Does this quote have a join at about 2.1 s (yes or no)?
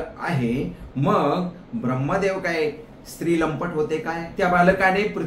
no